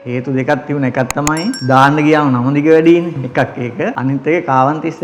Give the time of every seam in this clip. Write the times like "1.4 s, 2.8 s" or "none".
1.6 s, 4.0 s

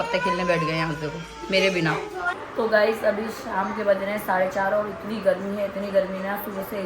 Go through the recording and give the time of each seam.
2.4 s

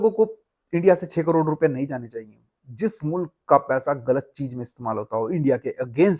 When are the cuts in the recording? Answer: none

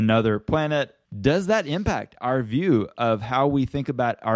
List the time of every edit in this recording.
1.0 s

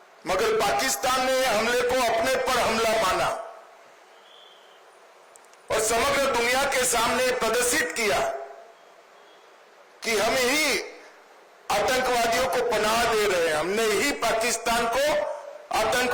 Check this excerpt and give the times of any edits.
none

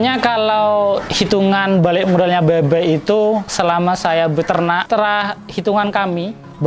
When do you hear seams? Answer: 1.1 s, 3.5 s, 4.8 s

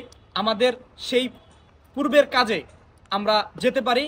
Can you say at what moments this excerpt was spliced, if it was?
none

